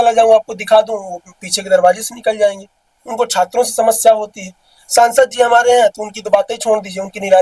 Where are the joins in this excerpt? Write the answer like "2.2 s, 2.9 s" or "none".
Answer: none